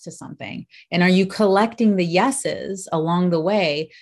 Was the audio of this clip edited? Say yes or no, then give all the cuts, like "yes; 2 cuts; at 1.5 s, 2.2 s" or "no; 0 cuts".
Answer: no; 0 cuts